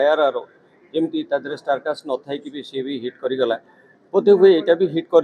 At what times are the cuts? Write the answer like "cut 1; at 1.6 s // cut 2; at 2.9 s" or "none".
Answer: none